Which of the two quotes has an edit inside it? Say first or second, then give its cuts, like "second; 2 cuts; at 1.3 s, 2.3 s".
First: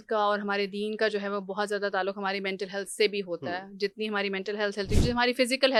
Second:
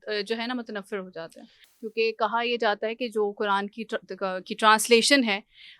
second; 1 cut; at 1.6 s